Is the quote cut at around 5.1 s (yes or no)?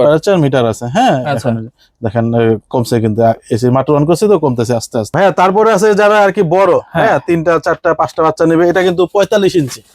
yes